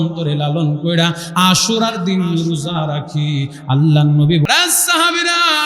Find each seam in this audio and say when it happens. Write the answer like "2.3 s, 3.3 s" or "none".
4.5 s